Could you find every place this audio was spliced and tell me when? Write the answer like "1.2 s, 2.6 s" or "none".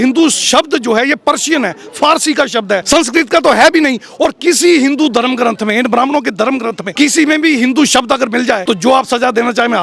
2.8 s, 6.8 s, 8.6 s